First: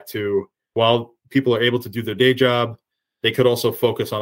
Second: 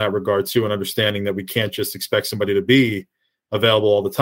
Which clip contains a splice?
first; 1 cut; at 0.9 s

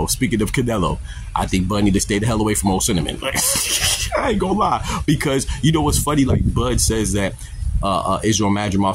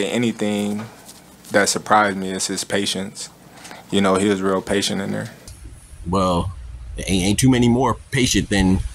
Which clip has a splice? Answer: second; 1 cut; at 5.4 s

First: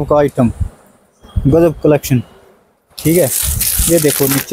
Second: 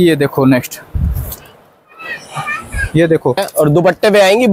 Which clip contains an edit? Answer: second; 1 cut; at 3.5 s

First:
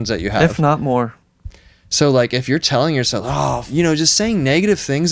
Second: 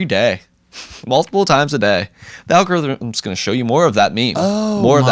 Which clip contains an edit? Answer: first; 1 cut; at 3.7 s

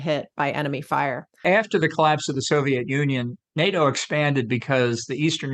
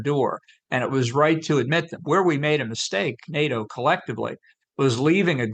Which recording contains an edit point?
first; 1 cut; at 1.4 s

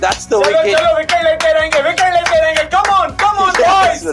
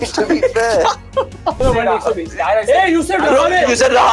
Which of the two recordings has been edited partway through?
second; 1 cut; at 1.6 s

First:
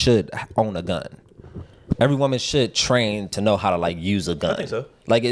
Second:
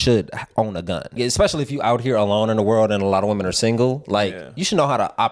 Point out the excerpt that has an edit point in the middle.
second; 1 cut; at 1.2 s

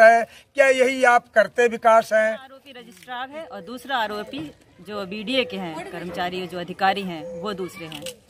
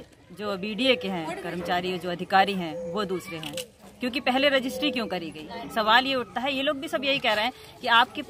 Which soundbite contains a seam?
first; 1 cut; at 2.9 s

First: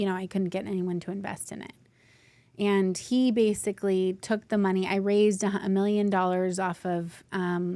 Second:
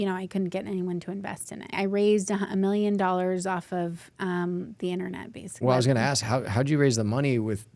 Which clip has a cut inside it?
second; 2 cuts; at 1.7 s, 5.5 s

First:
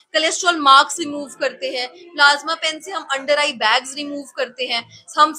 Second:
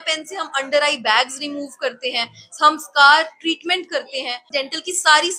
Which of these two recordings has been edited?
second; 1 cut; at 4.5 s

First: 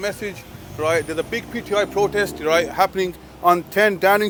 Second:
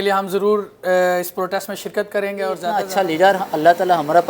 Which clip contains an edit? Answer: second; 1 cut; at 2.8 s

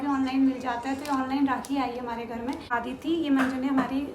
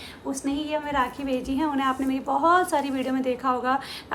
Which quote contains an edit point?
first; 1 cut; at 2.7 s

